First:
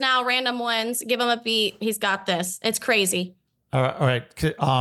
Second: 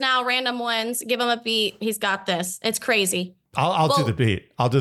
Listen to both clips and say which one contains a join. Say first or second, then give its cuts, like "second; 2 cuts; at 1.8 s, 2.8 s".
second; 1 cut; at 3.4 s